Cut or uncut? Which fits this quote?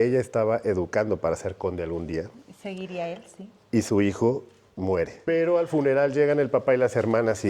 cut